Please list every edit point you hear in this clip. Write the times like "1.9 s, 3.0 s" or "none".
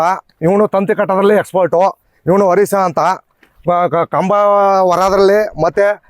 none